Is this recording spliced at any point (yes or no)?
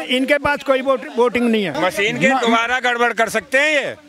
yes